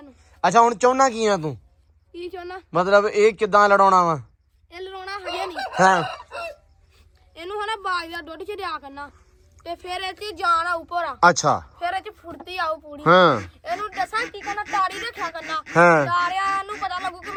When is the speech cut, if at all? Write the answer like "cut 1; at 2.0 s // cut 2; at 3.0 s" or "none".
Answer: none